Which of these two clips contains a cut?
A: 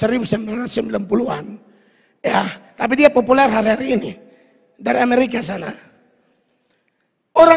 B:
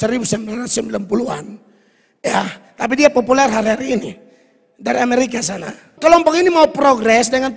B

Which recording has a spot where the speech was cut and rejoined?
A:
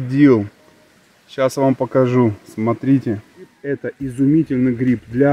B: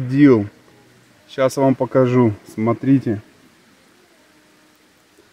A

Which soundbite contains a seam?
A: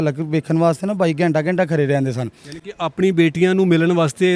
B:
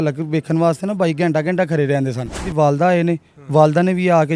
B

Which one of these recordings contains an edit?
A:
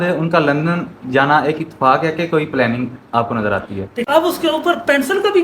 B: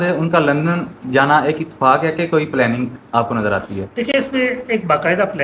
A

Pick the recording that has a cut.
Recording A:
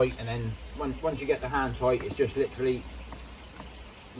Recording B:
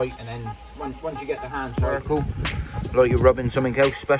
B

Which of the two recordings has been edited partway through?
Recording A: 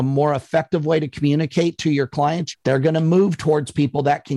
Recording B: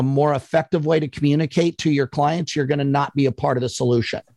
A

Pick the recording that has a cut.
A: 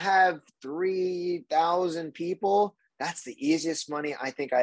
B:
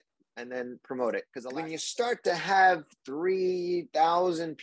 B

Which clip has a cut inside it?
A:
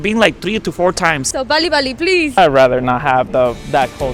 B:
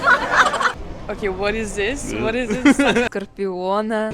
B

